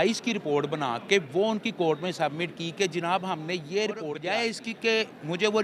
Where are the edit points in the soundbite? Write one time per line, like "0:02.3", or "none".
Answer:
0:04.2